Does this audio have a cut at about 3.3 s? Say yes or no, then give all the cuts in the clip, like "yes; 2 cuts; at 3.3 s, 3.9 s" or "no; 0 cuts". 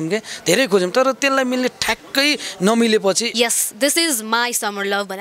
yes; 1 cut; at 3.3 s